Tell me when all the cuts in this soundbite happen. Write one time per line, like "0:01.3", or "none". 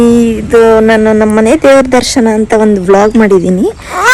none